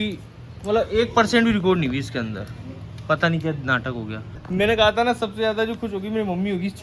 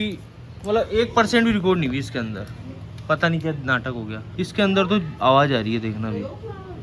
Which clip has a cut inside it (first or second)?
first